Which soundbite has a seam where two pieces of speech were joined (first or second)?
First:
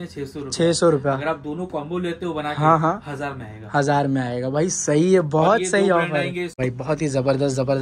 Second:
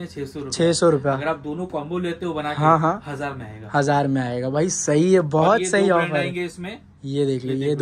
first